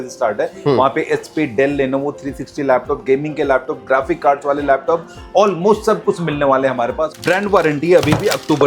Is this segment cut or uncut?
cut